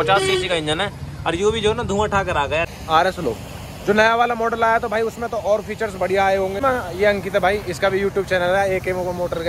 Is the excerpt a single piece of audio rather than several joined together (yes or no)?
no